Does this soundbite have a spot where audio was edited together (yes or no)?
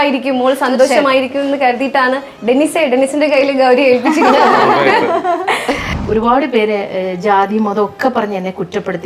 yes